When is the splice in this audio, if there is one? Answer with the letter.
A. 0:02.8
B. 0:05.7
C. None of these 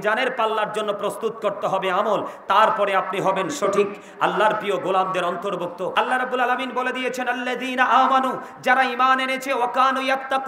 B